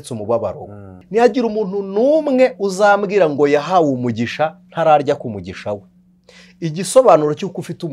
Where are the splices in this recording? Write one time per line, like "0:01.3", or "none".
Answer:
0:00.9